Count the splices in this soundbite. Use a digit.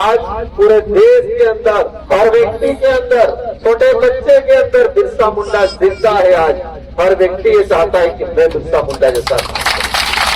2